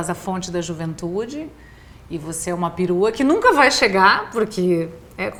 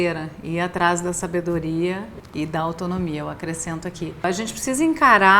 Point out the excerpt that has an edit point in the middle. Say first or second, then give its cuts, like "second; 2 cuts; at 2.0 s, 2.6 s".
second; 2 cuts; at 2.2 s, 4.2 s